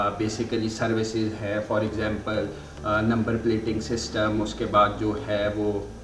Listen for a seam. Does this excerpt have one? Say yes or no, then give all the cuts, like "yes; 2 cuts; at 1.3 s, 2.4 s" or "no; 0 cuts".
no; 0 cuts